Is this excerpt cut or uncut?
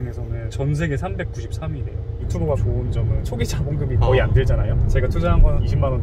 uncut